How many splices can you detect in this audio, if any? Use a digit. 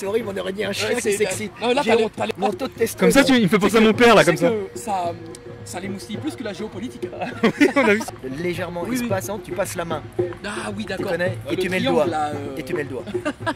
2